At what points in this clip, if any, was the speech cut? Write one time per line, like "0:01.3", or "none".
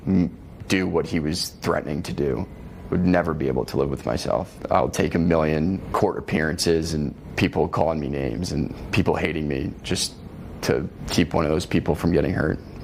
0:04.5
0:05.8
0:07.2
0:08.8
0:11.0